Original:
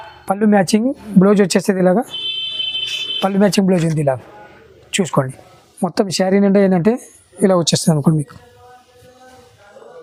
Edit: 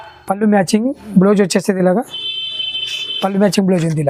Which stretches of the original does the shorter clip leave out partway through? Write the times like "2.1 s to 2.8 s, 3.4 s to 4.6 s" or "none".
none